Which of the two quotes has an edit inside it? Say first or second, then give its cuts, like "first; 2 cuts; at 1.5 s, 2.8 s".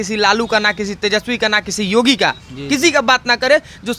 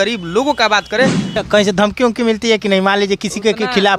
second; 1 cut; at 1.2 s